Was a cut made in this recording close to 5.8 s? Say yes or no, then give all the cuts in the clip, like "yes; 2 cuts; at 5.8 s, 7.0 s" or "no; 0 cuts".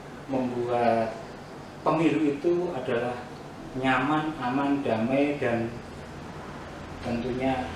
no; 0 cuts